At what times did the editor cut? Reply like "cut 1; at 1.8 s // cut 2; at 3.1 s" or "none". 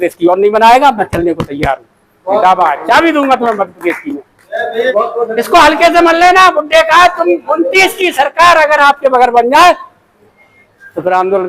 cut 1; at 4.9 s

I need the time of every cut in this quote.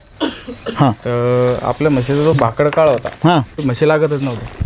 cut 1; at 3.6 s

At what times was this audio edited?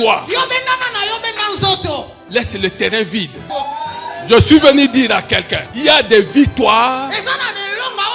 cut 1; at 2.2 s // cut 2; at 3.5 s // cut 3; at 5.6 s

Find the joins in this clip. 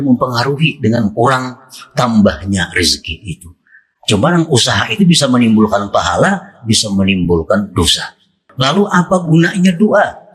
cut 1; at 8.4 s

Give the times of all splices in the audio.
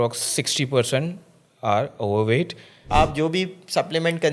cut 1; at 2.8 s

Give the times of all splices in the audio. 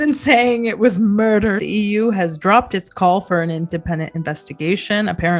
cut 1; at 1.6 s

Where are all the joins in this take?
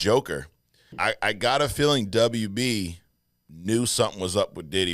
cut 1; at 0.9 s

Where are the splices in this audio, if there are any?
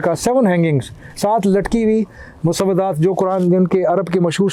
none

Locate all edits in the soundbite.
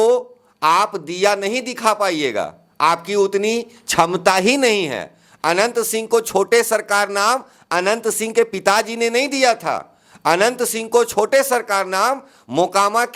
none

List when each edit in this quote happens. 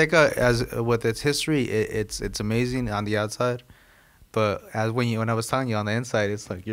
none

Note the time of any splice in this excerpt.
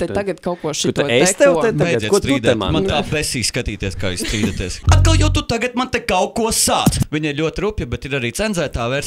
cut 1; at 4.8 s // cut 2; at 7.0 s

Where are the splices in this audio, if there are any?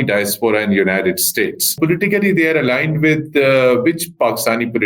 cut 1; at 1.7 s

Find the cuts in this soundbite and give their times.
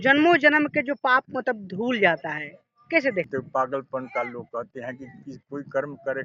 cut 1; at 3.3 s

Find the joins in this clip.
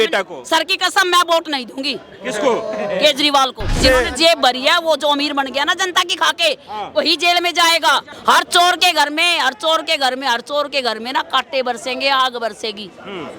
cut 1; at 3.8 s // cut 2; at 8.1 s

